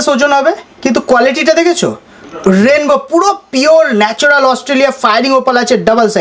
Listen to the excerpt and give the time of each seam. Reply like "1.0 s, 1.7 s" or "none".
none